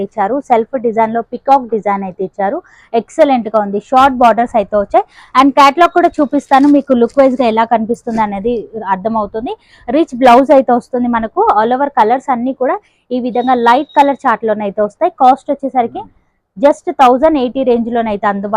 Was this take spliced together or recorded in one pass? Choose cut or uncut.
uncut